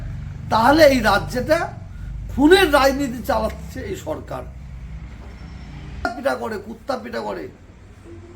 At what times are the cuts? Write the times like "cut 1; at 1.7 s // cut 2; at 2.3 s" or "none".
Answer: cut 1; at 6.1 s